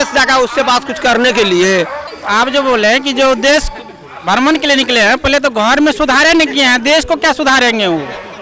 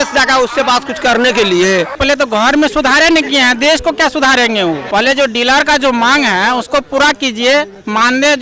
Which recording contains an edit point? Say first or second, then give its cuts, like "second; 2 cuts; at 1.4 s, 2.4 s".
second; 2 cuts; at 2.0 s, 4.8 s